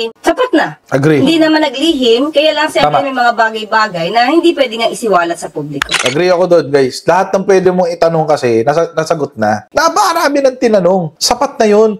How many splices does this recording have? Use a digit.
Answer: 3